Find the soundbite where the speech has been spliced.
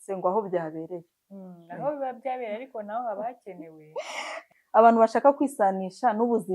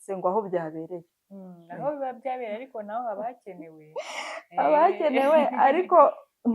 first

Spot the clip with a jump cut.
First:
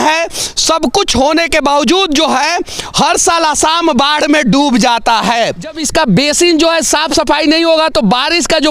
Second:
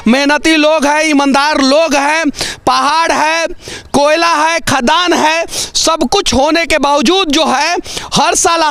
first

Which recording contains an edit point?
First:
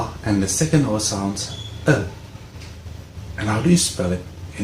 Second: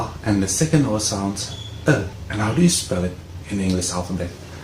second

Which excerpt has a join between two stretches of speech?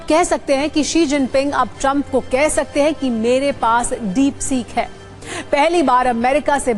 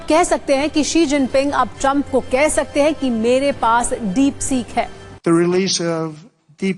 second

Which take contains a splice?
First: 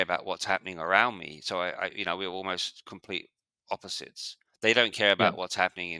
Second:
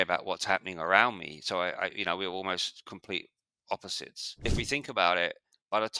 second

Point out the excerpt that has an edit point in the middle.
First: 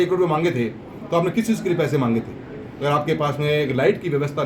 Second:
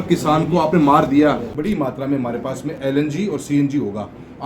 second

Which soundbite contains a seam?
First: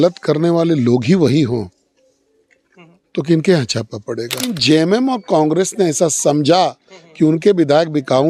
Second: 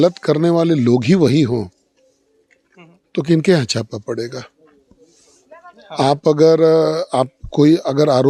first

